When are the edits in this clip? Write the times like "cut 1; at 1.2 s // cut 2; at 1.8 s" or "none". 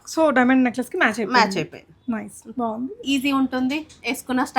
cut 1; at 2.9 s